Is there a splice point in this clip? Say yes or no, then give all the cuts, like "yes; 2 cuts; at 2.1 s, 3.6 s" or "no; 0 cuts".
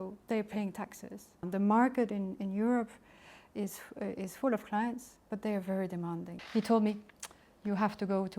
yes; 2 cuts; at 1.4 s, 6.4 s